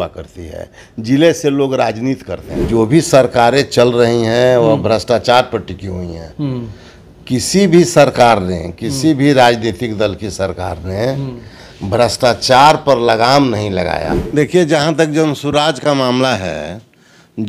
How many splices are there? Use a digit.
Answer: 2